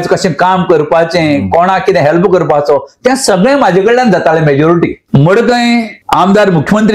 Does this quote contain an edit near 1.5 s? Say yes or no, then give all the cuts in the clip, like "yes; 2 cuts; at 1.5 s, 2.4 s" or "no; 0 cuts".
no; 2 cuts; at 5.0 s, 6.0 s